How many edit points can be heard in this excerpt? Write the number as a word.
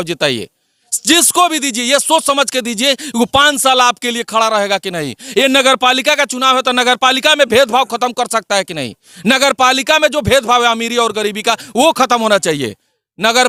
zero